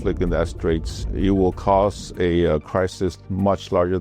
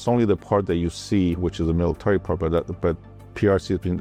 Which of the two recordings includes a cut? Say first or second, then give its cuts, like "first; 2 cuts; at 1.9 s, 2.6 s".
first; 1 cut; at 1.0 s